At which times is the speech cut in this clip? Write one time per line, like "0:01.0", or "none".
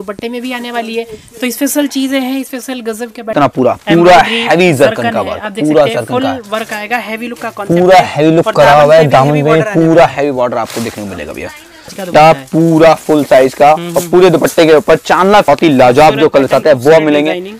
0:03.3
0:12.0
0:15.4